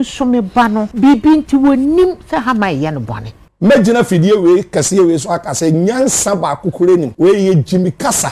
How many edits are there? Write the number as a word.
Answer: two